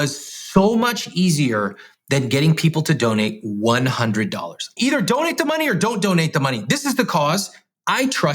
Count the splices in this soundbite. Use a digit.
1